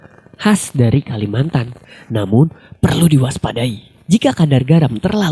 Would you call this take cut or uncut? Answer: cut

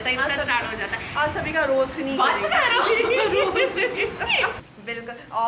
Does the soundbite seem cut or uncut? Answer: cut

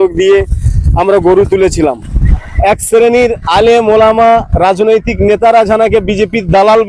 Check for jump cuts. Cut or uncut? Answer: cut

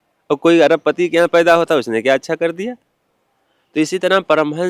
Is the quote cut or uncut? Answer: uncut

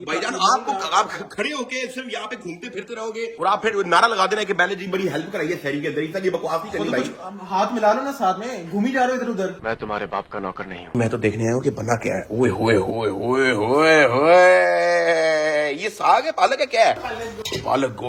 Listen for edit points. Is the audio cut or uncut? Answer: uncut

